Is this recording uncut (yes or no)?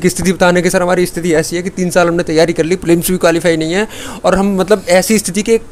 yes